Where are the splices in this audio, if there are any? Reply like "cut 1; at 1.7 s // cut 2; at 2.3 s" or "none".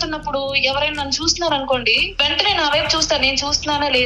cut 1; at 2.0 s

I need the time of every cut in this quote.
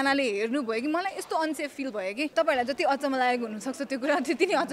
cut 1; at 2.3 s

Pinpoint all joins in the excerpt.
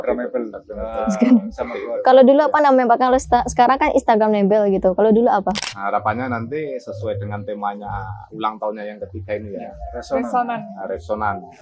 cut 1; at 5.7 s

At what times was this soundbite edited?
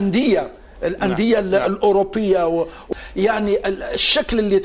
cut 1; at 2.8 s

